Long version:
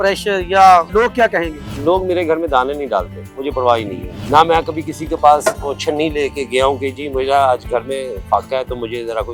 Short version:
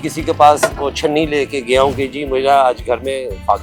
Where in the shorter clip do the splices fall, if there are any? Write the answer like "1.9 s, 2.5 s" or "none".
none